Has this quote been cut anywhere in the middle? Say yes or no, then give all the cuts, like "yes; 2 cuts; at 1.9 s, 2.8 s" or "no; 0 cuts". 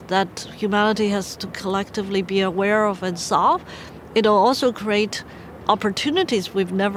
no; 0 cuts